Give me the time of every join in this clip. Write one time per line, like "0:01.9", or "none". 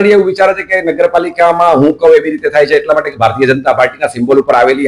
none